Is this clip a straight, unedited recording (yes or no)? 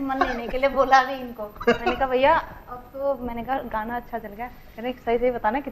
yes